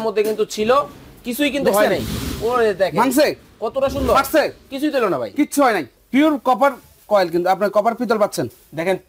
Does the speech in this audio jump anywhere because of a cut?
yes; 1 cut; at 6.0 s

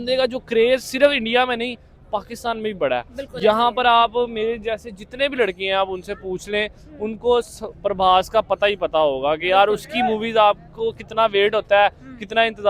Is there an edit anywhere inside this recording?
no; 0 cuts

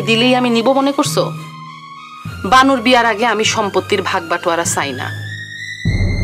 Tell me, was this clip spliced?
no; 0 cuts

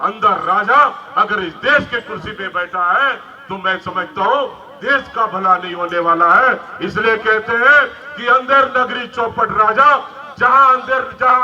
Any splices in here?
no; 0 cuts

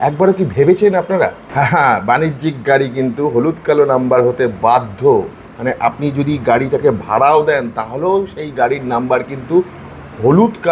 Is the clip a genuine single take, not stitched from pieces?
no; 1 cut; at 1.4 s

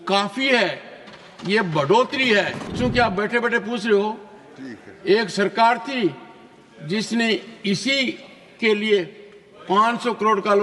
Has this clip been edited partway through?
yes; 1 cut; at 2.7 s

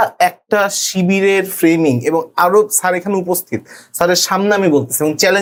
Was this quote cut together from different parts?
no; 0 cuts

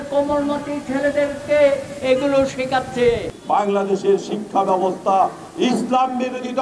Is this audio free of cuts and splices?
no; 1 cut; at 3.3 s

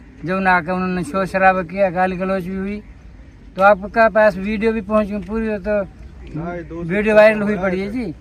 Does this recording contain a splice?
no; 0 cuts

